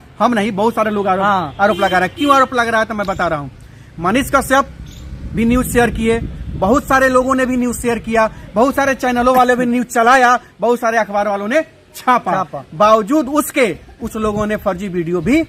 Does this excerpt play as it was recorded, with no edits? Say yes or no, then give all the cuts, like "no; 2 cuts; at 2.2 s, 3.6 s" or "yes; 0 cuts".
yes; 0 cuts